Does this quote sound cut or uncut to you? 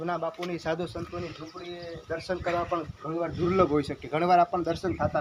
uncut